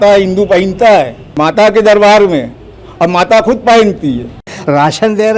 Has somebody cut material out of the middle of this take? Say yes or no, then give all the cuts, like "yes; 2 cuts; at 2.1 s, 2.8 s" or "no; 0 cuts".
yes; 2 cuts; at 1.3 s, 4.5 s